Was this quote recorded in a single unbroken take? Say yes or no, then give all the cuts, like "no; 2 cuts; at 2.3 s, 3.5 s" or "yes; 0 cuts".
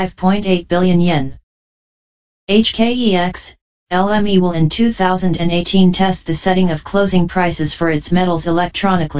yes; 0 cuts